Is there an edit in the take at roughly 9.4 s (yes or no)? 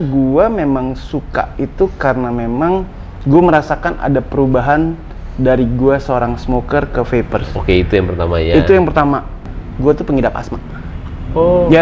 yes